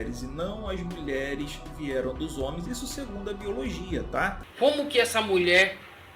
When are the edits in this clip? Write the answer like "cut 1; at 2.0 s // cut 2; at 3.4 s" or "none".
cut 1; at 4.4 s